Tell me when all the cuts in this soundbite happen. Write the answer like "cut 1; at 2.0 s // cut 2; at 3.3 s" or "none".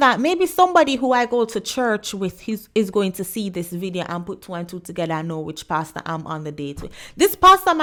none